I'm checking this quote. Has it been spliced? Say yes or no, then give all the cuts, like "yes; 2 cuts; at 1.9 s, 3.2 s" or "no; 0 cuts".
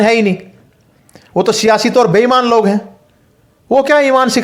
no; 0 cuts